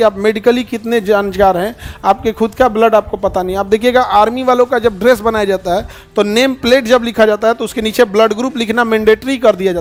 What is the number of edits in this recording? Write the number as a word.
zero